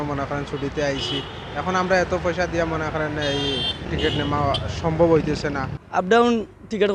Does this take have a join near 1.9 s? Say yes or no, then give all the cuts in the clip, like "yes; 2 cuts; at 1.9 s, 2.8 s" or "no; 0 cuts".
no; 2 cuts; at 3.9 s, 5.7 s